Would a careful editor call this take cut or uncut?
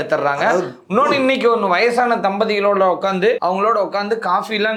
uncut